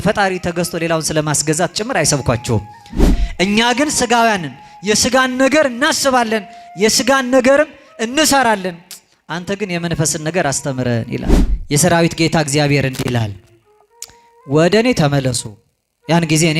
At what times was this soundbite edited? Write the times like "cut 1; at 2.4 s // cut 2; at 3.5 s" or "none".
cut 1; at 3.2 s // cut 2; at 11.3 s